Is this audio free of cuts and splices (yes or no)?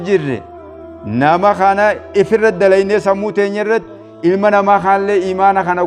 yes